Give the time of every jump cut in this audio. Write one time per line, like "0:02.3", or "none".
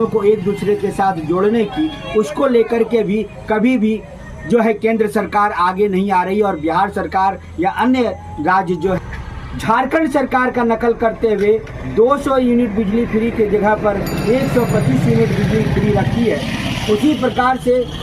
0:09.0